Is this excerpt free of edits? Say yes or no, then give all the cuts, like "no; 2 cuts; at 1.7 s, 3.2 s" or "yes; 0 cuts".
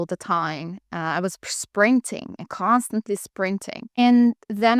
yes; 0 cuts